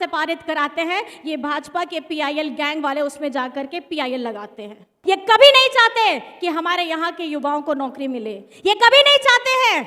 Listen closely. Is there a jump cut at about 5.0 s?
yes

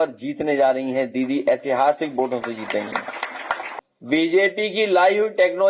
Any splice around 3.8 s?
yes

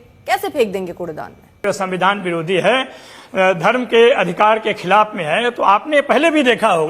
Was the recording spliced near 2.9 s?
no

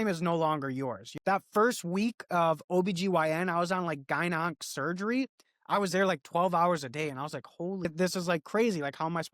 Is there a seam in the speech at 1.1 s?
yes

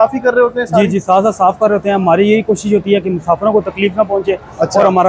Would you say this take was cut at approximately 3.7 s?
no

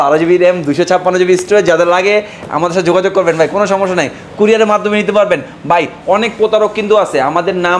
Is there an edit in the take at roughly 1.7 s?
no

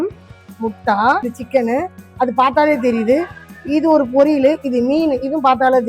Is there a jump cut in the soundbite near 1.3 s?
yes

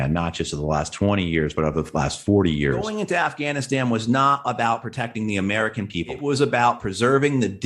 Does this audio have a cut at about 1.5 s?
no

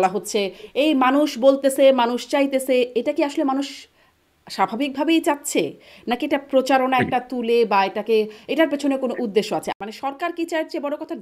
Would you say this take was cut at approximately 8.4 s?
no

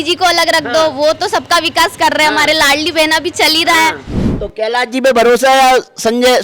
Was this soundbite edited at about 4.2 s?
yes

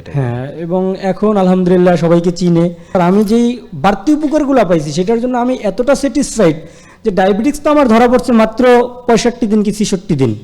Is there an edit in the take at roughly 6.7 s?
no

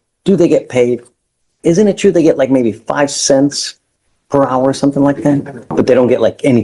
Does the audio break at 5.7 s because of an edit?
yes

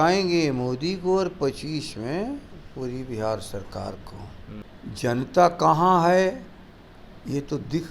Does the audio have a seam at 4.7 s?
yes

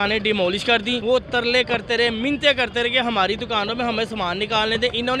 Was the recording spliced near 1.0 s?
yes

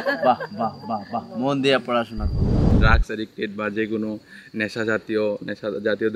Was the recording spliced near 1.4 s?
no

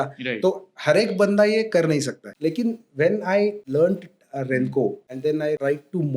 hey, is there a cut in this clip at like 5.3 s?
yes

